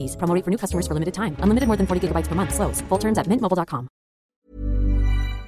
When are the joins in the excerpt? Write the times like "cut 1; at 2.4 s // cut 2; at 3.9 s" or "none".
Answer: cut 1; at 4.4 s

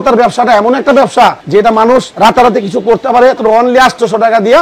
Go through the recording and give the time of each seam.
cut 1; at 1.8 s // cut 2; at 3.4 s

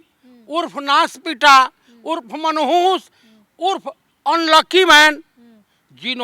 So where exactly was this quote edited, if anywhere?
none

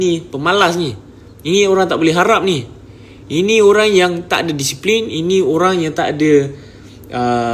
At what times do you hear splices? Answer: none

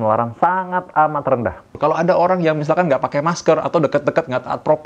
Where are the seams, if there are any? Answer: cut 1; at 1.8 s

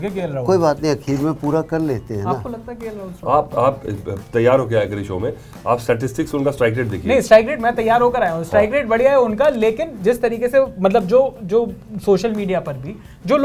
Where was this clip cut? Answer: none

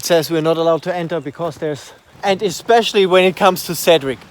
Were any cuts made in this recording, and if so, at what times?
cut 1; at 2.1 s

